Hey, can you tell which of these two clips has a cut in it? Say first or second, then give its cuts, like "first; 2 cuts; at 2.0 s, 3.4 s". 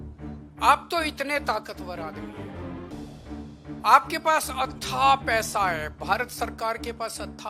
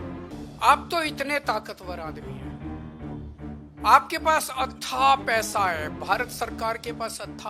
first; 2 cuts; at 1.9 s, 3.6 s